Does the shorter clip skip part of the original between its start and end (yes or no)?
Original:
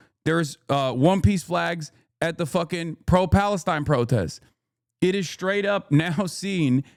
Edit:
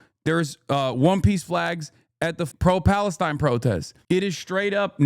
yes